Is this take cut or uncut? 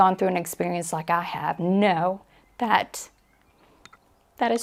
uncut